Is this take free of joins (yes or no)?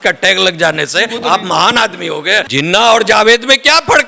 no